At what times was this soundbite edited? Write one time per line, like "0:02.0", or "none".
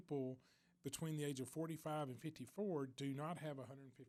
none

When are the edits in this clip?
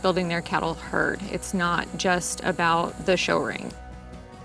none

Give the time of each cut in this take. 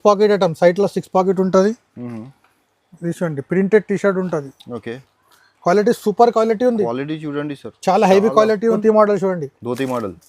0:08.8

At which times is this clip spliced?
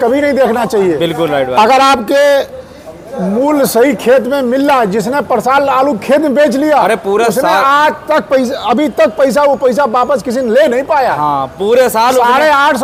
none

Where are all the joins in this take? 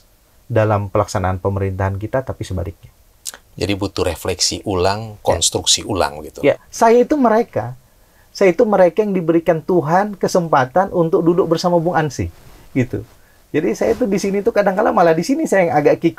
0:06.7

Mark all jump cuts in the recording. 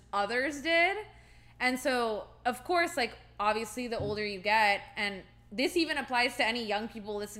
none

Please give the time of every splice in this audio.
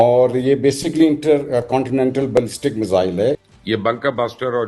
0:03.4

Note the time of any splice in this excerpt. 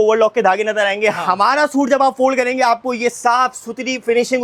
none

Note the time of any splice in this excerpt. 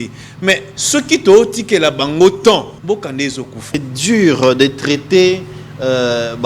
0:02.7
0:03.9

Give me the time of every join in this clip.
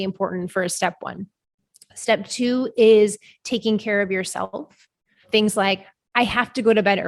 0:05.2
0:06.0

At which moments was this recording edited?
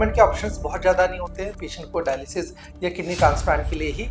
none

